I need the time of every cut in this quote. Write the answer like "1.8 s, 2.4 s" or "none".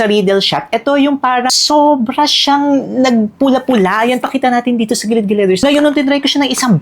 1.5 s, 5.6 s